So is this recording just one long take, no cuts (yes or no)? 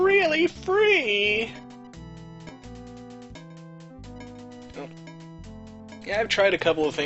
no